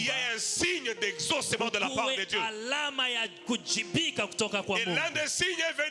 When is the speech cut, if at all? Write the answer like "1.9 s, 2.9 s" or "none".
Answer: none